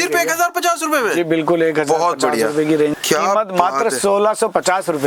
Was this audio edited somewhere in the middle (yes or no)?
yes